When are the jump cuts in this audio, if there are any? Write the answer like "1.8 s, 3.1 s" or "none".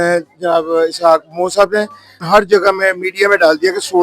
2.2 s